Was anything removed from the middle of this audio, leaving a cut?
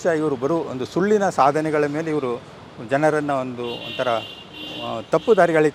no; 0 cuts

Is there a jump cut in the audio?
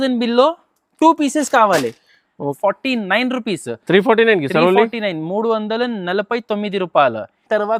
yes; 1 cut; at 2.5 s

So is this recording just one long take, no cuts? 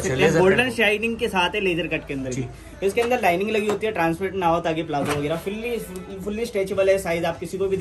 yes; 0 cuts

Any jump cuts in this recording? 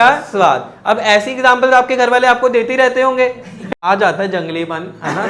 yes; 1 cut; at 3.6 s

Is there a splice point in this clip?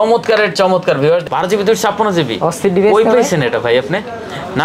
yes; 1 cut; at 1.2 s

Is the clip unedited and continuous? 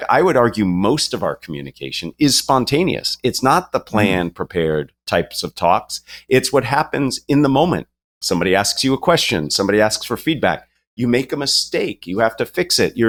yes; 0 cuts

